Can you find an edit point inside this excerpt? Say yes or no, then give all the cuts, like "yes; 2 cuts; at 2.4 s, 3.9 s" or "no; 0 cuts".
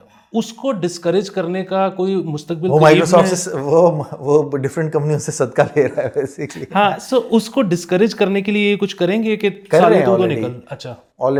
no; 0 cuts